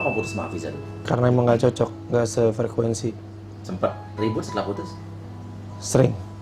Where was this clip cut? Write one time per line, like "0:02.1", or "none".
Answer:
0:01.0